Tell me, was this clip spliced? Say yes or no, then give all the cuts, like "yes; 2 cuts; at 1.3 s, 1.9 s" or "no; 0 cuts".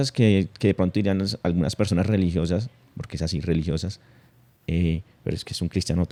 no; 0 cuts